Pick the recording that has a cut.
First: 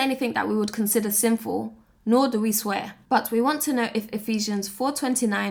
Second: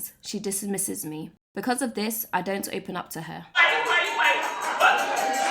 second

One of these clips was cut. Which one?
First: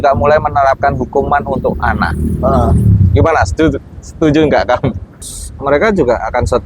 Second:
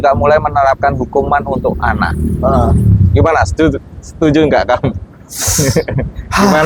first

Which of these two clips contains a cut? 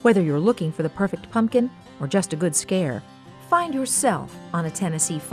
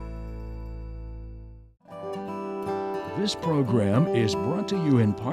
second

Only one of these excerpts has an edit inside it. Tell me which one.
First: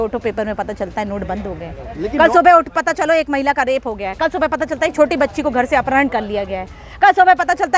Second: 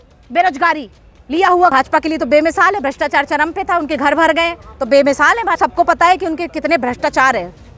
second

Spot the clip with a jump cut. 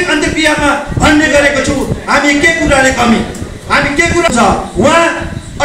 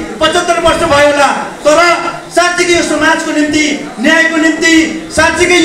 first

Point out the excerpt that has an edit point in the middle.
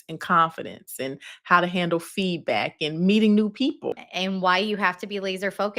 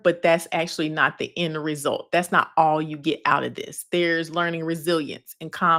first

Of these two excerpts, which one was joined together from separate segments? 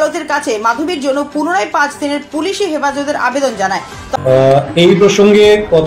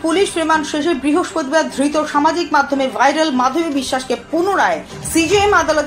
first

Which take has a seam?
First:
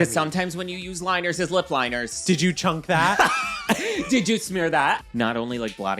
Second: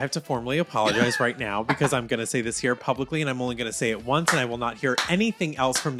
first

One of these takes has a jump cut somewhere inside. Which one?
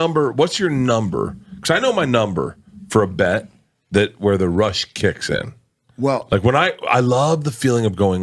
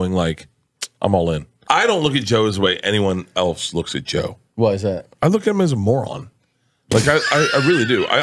second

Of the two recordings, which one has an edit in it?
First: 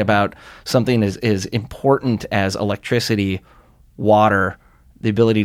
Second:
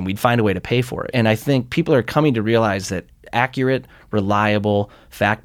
second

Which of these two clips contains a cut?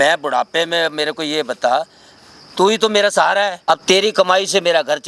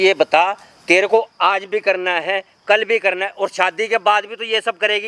first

